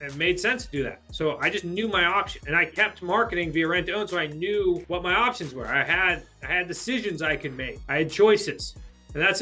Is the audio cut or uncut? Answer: cut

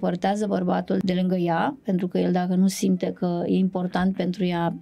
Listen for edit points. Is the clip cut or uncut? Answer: cut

